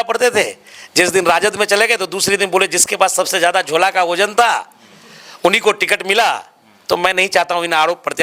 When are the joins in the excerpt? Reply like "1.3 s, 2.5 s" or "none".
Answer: none